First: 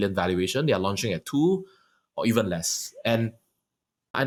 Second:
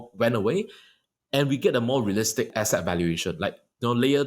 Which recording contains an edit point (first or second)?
second